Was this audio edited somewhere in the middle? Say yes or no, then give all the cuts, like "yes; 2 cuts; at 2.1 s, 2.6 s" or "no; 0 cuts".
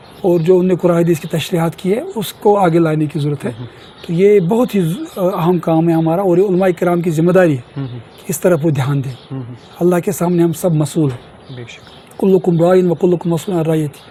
no; 0 cuts